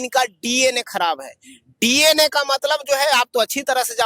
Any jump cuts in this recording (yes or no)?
no